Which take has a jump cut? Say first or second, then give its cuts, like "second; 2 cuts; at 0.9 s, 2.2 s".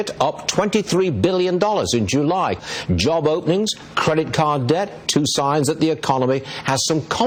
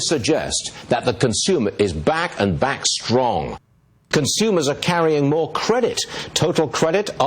second; 2 cuts; at 3.9 s, 6.1 s